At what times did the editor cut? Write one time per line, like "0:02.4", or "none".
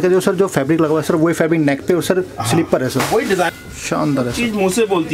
0:03.5